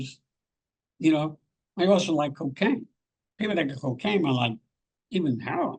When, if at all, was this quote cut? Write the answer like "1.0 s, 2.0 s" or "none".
none